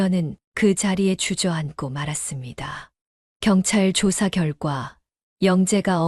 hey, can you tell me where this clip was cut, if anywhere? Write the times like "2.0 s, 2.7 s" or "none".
none